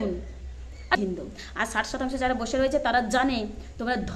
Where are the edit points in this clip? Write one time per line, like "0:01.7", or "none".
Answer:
0:01.0